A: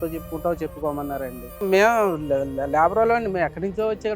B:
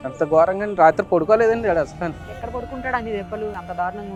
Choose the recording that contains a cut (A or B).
A